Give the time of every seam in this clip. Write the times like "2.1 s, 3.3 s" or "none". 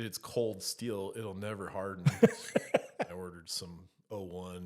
3.0 s